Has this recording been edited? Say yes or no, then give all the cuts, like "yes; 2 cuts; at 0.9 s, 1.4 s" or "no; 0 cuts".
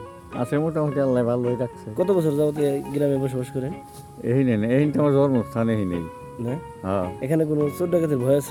no; 0 cuts